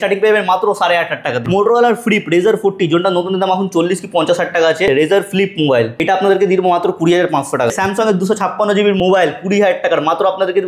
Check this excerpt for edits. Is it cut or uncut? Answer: cut